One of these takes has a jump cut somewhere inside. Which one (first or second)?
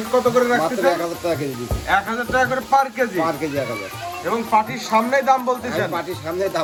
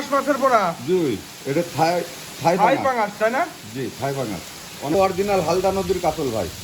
second